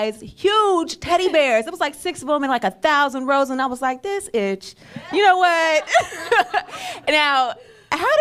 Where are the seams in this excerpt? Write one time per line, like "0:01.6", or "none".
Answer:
0:05.5